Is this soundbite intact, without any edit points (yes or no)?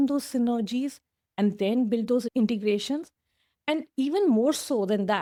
yes